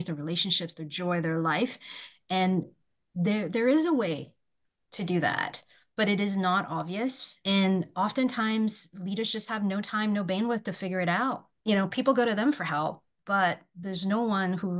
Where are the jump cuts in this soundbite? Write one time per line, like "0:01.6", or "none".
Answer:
0:07.3
0:11.5